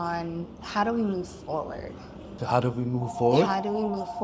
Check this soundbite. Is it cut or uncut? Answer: cut